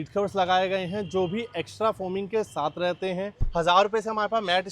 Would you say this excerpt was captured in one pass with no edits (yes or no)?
no